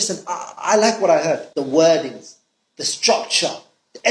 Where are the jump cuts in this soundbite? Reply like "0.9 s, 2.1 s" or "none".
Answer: 1.5 s